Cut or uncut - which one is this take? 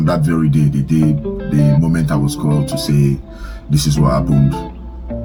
uncut